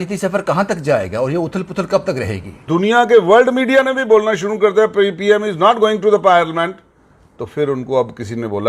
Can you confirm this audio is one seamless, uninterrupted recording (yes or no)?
no